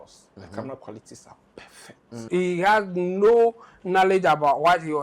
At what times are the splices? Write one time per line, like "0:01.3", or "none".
0:02.3